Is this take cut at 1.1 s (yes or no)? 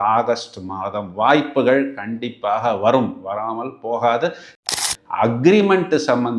no